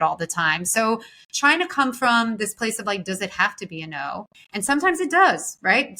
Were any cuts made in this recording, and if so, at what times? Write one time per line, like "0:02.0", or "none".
0:04.4